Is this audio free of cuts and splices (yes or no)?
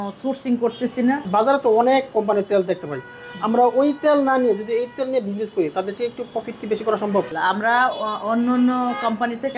no